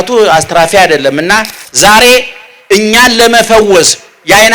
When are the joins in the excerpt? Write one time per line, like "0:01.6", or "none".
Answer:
0:01.6